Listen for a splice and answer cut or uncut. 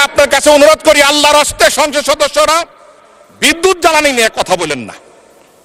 uncut